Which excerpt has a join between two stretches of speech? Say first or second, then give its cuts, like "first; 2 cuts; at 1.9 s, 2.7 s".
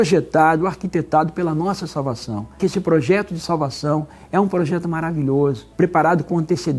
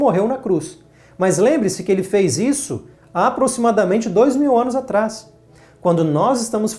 first; 2 cuts; at 2.6 s, 5.6 s